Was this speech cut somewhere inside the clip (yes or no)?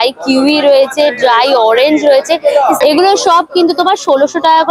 no